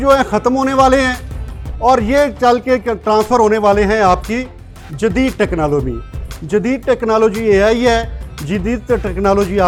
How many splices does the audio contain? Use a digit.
0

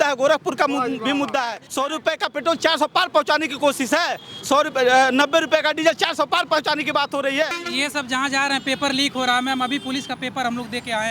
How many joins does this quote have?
2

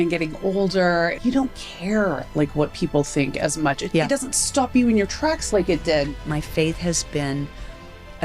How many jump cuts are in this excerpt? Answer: 3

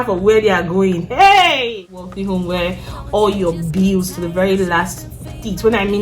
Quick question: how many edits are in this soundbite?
1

